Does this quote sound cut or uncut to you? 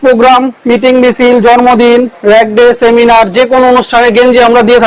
uncut